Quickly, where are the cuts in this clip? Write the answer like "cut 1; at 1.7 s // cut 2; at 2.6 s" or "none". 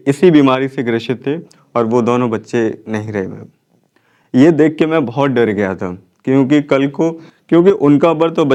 none